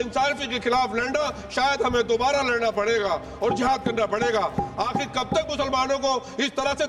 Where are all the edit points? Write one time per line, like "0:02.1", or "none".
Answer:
none

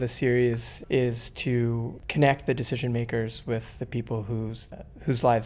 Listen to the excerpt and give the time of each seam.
none

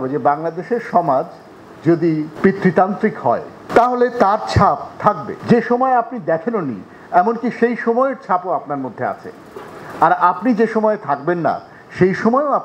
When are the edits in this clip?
0:02.3
0:05.3

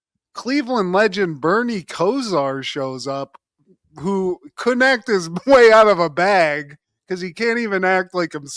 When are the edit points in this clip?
none

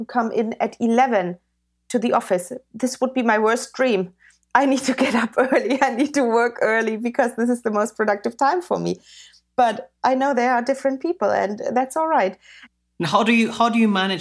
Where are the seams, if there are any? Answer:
none

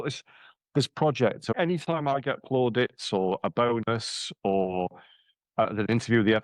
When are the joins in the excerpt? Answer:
0:01.5

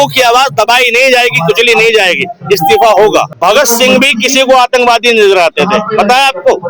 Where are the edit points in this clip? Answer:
0:03.3

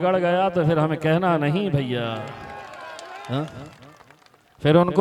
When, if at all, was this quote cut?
none

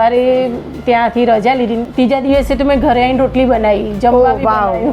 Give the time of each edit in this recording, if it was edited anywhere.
0:01.8

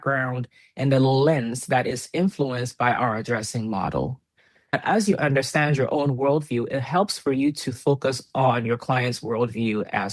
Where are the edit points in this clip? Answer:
0:04.7

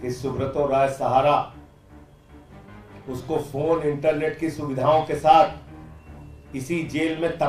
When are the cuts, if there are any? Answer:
0:01.7
0:03.0

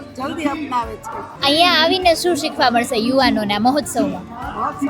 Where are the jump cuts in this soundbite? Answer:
0:01.3

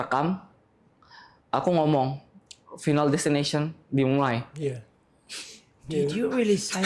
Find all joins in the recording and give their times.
none

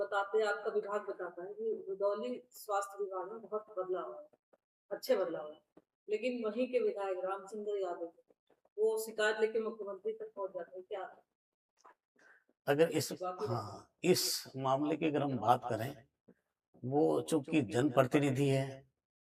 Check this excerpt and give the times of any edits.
none

